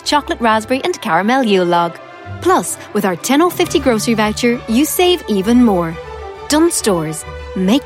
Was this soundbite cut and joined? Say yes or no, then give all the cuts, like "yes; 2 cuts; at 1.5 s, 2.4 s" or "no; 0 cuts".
no; 0 cuts